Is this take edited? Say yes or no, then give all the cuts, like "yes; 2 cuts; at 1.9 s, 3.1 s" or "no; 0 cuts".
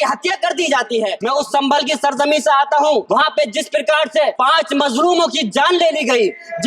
yes; 3 cuts; at 1.2 s, 3.0 s, 4.4 s